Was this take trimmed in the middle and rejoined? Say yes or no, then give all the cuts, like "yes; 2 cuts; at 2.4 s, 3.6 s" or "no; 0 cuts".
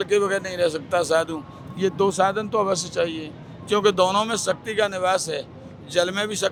no; 0 cuts